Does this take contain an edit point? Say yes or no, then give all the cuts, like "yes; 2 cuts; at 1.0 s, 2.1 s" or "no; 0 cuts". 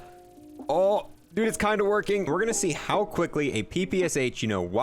yes; 1 cut; at 2.3 s